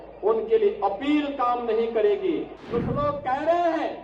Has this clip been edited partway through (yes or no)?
yes